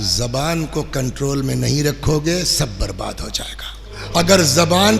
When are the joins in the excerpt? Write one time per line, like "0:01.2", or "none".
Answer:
0:04.0